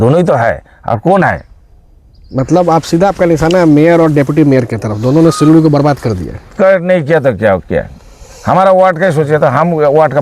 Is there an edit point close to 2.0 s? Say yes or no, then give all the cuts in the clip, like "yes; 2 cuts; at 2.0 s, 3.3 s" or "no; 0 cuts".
no; 0 cuts